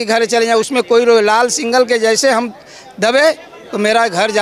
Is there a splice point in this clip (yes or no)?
no